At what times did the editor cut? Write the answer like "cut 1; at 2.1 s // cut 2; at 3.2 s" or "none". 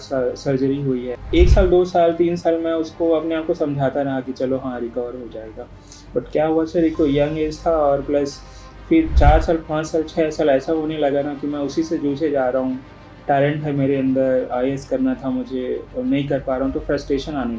cut 1; at 1.2 s